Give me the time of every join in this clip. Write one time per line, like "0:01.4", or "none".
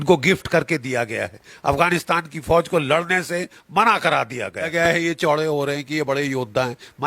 0:04.7